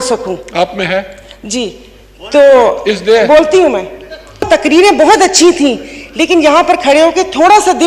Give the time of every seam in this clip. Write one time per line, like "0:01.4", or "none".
0:04.5